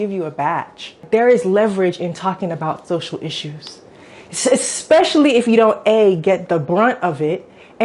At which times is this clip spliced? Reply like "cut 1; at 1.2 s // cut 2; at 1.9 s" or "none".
cut 1; at 1.0 s